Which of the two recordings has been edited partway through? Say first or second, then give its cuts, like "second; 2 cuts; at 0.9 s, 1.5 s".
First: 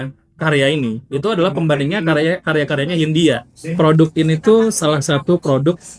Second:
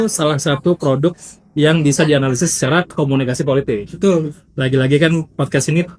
first; 1 cut; at 3.6 s